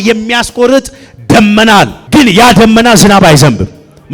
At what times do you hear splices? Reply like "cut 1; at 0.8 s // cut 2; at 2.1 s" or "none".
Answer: cut 1; at 2.0 s